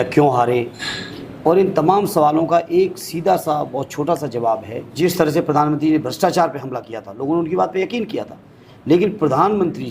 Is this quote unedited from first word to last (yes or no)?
no